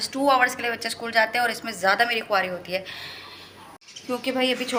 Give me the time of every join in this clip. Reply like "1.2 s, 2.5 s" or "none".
none